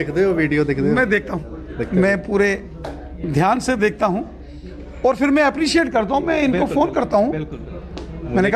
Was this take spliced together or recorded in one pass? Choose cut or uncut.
uncut